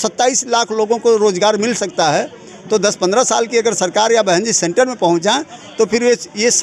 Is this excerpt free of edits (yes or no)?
yes